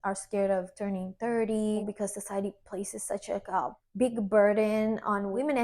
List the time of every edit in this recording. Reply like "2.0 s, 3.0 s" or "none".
1.8 s